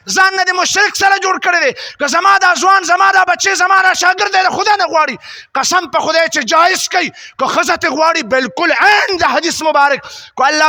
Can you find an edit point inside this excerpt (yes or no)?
no